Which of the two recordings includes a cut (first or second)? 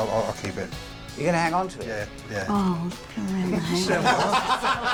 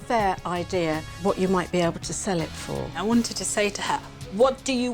second